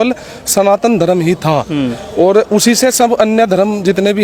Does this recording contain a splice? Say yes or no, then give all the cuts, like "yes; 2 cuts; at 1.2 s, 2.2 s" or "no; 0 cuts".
no; 0 cuts